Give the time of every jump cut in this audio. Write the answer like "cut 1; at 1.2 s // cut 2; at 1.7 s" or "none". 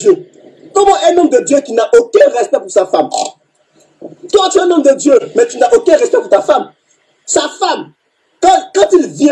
cut 1; at 6.8 s